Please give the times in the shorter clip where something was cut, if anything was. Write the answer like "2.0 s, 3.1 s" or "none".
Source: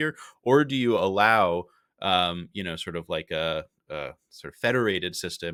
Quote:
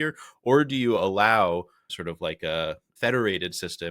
1.9 s, 2.9 s